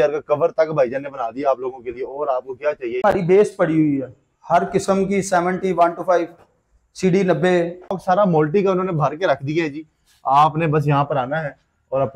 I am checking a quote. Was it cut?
yes; 2 cuts; at 3.0 s, 8.0 s

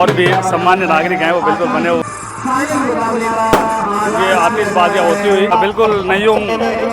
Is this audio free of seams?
no; 2 cuts; at 2.0 s, 5.5 s

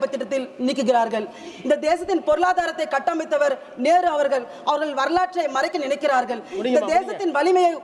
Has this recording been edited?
no; 0 cuts

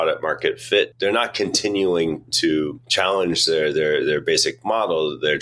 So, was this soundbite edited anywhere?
yes; 2 cuts; at 0.9 s, 2.4 s

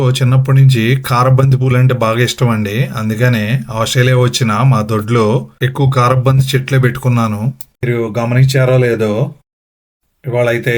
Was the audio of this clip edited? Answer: no; 0 cuts

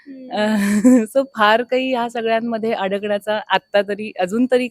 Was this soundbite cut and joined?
no; 0 cuts

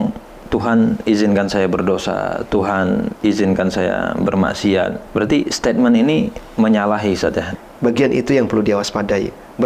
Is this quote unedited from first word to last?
no; 2 cuts; at 5.0 s, 7.5 s

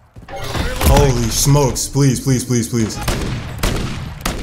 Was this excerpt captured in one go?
no; 1 cut; at 3.0 s

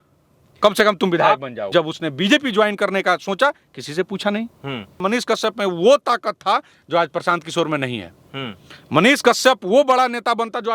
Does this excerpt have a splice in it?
yes; 2 cuts; at 1.7 s, 5.0 s

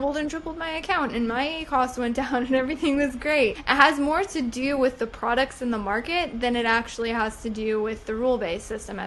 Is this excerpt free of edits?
yes; 0 cuts

